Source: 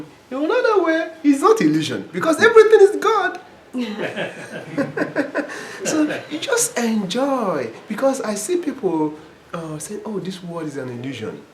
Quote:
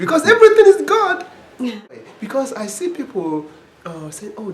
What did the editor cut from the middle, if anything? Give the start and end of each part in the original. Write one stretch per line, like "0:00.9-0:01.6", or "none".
0:04.1-0:07.6